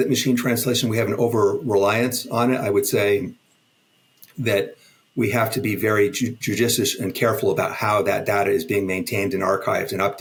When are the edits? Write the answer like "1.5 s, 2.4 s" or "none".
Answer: none